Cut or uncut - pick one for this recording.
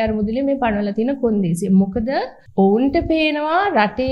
cut